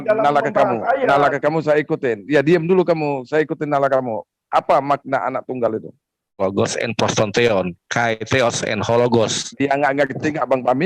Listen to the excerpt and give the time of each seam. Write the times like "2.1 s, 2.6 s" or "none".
6.4 s